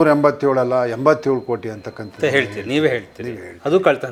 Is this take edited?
no; 0 cuts

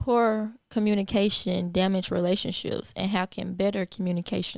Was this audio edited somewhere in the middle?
no; 0 cuts

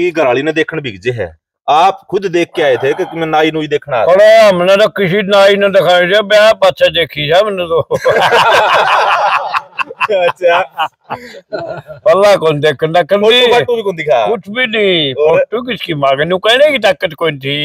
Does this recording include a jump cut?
no; 0 cuts

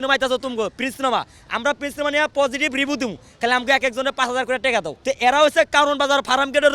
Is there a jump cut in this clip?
yes; 1 cut; at 4.9 s

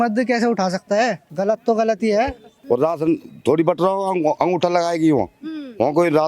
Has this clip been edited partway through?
yes; 2 cuts; at 1.2 s, 2.5 s

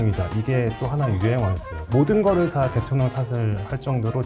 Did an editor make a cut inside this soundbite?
no; 0 cuts

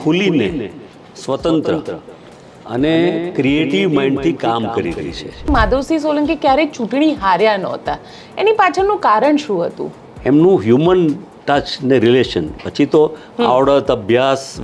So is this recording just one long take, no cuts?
no; 2 cuts; at 5.5 s, 10.1 s

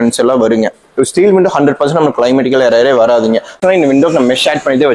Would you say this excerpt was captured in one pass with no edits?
no; 1 cut; at 3.6 s

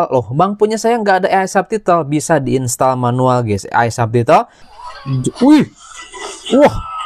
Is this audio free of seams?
no; 1 cut; at 4.6 s

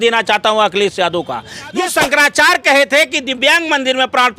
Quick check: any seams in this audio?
yes; 1 cut; at 1.8 s

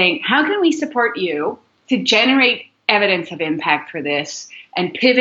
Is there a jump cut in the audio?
no; 0 cuts

